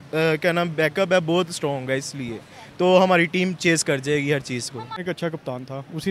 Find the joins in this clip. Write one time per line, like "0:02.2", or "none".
0:05.0